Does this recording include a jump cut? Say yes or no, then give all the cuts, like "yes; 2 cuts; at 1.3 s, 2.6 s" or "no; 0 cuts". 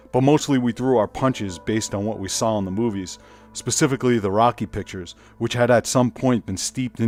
no; 0 cuts